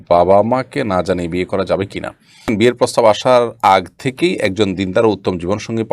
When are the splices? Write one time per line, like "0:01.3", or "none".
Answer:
0:02.5